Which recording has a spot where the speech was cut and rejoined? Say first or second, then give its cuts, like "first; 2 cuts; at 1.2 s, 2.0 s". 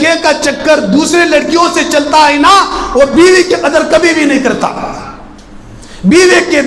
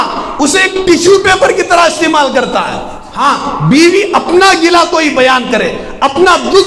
second; 1 cut; at 3.1 s